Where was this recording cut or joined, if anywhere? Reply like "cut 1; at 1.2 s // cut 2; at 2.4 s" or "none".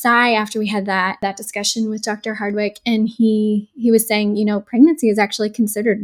cut 1; at 1.2 s